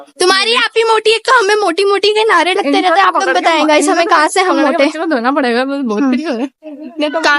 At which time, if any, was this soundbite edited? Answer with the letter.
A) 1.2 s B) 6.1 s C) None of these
A